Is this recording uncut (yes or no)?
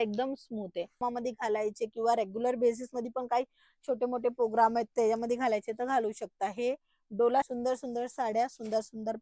no